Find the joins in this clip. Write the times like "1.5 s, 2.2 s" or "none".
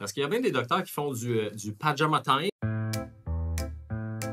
2.5 s